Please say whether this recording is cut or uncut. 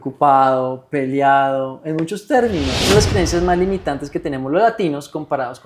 cut